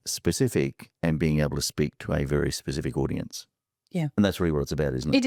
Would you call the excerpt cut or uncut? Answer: uncut